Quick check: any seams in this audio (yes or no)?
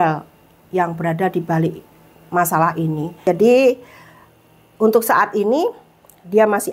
yes